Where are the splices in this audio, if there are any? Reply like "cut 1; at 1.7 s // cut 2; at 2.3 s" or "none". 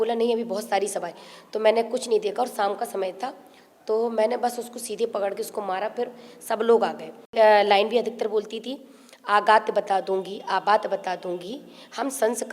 cut 1; at 7.3 s